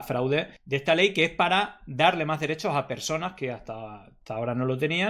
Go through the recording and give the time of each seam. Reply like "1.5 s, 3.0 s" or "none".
none